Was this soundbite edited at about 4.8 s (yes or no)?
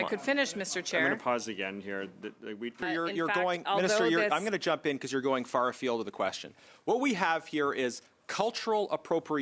no